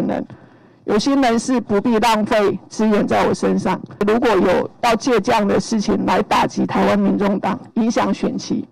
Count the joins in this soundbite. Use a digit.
1